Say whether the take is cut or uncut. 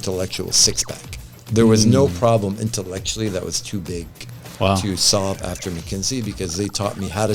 uncut